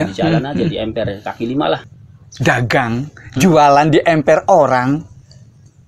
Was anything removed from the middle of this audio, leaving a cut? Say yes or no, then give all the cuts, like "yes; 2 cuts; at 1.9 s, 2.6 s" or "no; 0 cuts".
yes; 1 cut; at 1.9 s